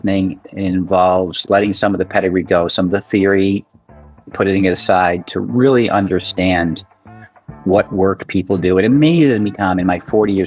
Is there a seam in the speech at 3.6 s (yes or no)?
no